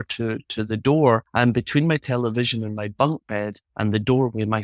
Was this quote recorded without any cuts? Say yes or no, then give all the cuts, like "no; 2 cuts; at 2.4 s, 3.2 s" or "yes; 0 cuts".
no; 2 cuts; at 1.3 s, 3.6 s